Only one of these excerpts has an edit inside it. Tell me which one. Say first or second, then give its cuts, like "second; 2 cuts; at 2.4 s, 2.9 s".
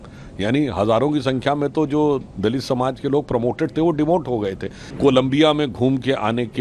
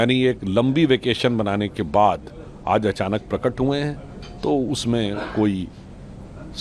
first; 1 cut; at 4.9 s